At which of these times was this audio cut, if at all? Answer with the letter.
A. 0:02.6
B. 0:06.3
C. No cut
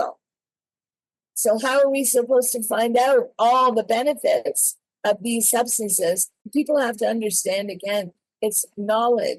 B